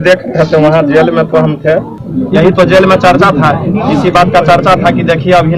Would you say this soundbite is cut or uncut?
cut